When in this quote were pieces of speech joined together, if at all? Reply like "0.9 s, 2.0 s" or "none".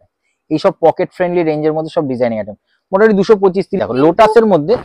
3.9 s